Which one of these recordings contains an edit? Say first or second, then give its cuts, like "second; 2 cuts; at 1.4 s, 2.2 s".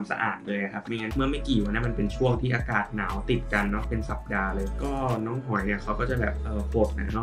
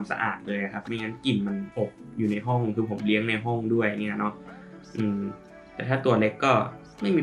first; 1 cut; at 1.1 s